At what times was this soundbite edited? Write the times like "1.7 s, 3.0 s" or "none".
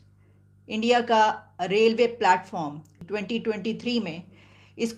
3.0 s